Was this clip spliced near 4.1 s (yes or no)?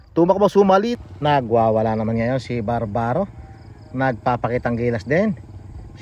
no